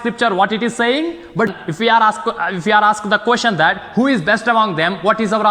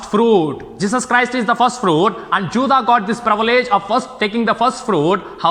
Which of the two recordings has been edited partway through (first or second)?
first